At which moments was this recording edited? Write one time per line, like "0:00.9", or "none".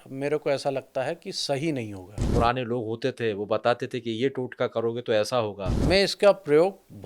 0:02.2
0:05.8